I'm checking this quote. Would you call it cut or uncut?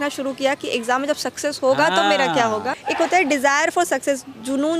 cut